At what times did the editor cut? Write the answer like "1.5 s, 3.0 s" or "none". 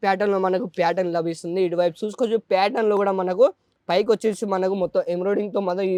none